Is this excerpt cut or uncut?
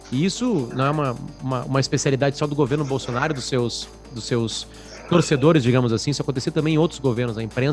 uncut